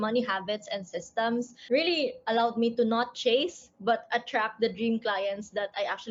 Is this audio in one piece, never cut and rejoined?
yes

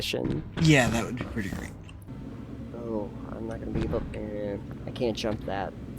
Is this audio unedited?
no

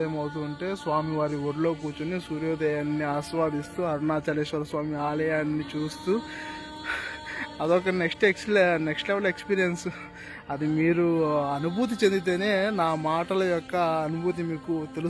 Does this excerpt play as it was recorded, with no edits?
yes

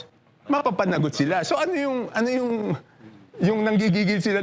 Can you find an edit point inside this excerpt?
no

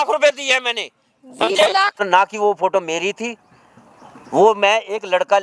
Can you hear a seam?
yes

